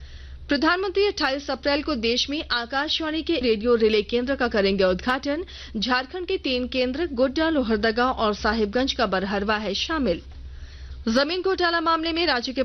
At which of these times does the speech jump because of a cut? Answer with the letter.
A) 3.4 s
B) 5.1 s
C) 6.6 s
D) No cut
A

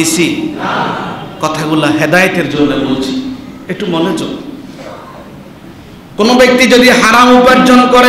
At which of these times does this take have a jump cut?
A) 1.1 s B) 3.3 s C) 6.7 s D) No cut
D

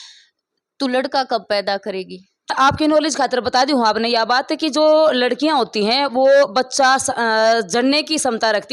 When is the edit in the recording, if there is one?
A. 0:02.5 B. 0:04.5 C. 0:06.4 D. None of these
A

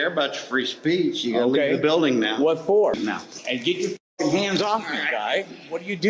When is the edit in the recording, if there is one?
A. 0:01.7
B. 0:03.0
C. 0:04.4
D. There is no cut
B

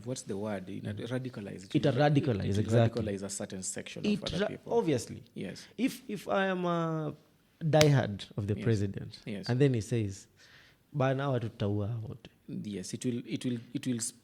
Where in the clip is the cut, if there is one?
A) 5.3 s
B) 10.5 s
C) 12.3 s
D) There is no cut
D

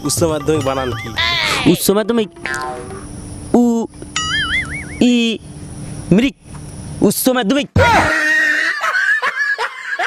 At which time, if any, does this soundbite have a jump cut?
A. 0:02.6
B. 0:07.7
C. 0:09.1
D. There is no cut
B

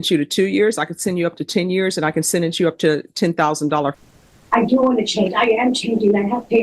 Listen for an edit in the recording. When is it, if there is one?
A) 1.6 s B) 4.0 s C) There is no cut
B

